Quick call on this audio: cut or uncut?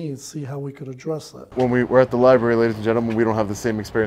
cut